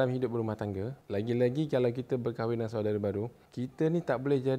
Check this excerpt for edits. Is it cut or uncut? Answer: cut